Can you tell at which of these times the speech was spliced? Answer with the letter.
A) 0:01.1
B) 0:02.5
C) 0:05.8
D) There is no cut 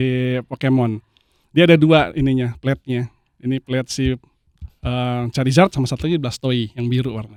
D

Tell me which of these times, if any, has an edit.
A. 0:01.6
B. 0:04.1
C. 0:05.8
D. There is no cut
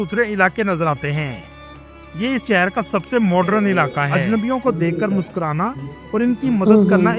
B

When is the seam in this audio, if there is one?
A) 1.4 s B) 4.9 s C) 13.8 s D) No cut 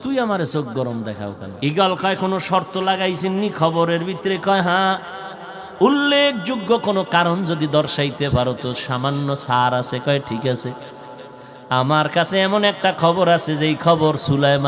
A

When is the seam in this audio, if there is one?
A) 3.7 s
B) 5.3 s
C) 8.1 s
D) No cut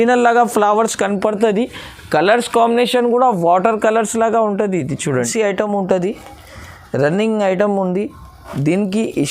B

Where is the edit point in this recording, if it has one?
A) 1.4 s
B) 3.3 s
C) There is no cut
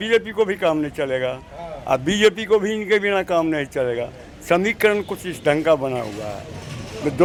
C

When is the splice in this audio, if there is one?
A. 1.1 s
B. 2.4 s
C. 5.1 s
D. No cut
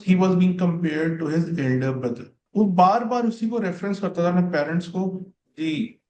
B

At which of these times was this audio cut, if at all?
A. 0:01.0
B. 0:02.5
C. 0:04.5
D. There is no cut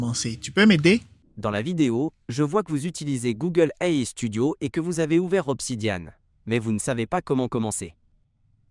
D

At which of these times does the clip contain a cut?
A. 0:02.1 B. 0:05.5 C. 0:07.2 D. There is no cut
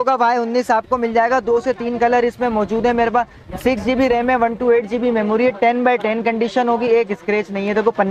D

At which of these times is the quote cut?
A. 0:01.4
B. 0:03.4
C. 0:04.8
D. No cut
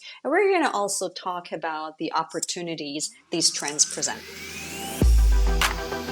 C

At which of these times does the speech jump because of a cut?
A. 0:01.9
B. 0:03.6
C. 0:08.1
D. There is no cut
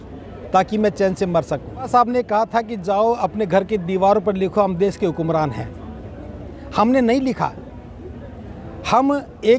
A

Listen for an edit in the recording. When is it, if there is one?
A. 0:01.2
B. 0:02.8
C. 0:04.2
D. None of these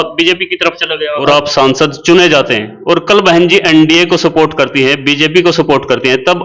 A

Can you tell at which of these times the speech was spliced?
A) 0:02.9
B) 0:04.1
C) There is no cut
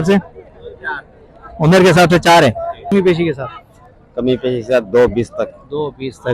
A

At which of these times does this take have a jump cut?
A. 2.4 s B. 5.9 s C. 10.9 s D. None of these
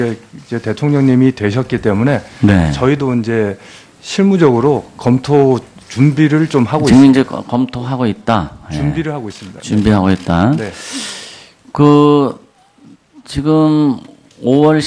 C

